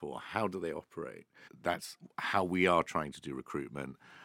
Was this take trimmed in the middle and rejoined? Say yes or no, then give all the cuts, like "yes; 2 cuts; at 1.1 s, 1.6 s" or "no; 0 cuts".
yes; 1 cut; at 1.5 s